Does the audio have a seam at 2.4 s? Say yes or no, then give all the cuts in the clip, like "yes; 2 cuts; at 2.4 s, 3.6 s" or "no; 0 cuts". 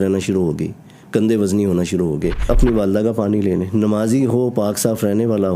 yes; 1 cut; at 2.4 s